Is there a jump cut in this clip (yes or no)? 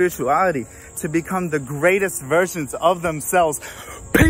no